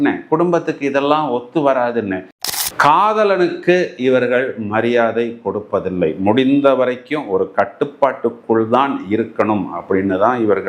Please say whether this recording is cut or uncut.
cut